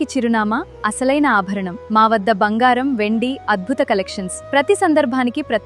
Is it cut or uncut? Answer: uncut